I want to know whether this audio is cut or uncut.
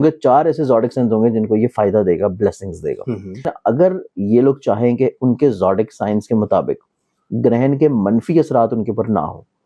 cut